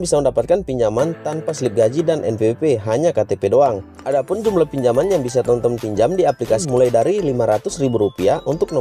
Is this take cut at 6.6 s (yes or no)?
yes